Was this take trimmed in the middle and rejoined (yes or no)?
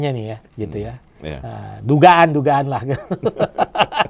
no